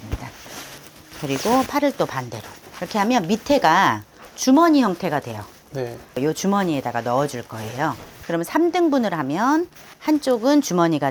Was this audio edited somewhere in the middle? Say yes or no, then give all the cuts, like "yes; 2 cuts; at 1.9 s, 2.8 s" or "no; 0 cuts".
no; 0 cuts